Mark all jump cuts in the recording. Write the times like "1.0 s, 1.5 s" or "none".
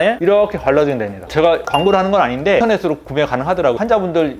2.6 s